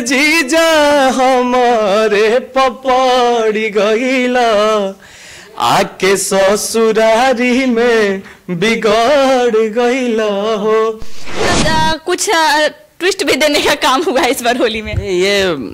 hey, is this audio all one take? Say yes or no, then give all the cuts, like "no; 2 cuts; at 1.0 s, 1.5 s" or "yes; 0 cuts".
no; 1 cut; at 11.4 s